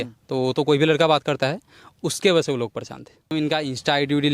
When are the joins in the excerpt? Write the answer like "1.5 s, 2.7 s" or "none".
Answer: 3.3 s